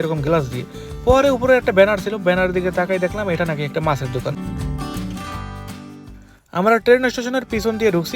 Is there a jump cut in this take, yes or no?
yes